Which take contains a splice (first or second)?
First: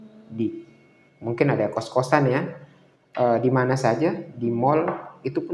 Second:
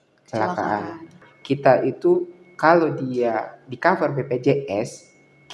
second